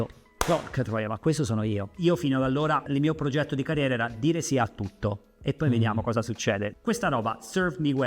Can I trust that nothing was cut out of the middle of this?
no; 3 cuts; at 1.9 s, 2.8 s, 6.7 s

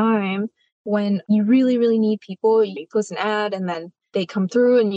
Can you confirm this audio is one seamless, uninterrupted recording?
no; 2 cuts; at 2.8 s, 3.9 s

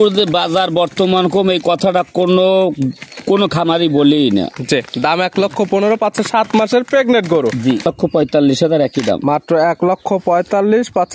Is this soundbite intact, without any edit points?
no; 1 cut; at 7.9 s

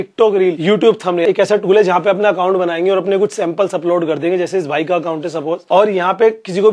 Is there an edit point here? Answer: yes; 2 cuts; at 1.1 s, 5.6 s

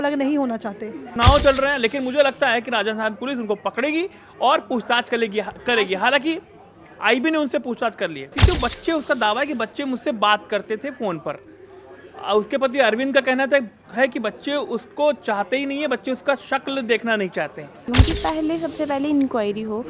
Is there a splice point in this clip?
yes; 3 cuts; at 1.1 s, 8.4 s, 17.8 s

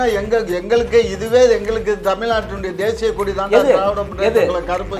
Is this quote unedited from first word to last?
yes; 0 cuts

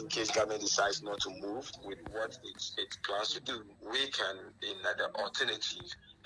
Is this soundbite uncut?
no; 1 cut; at 3.7 s

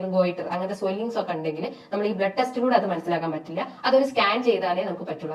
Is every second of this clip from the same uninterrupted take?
yes; 0 cuts

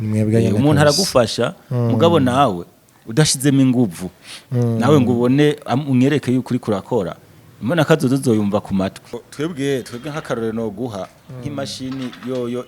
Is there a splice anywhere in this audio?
yes; 1 cut; at 9.2 s

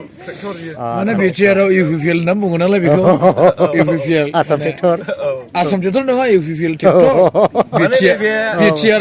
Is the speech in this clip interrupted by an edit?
no; 0 cuts

